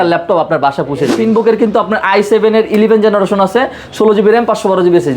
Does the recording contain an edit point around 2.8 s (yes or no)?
no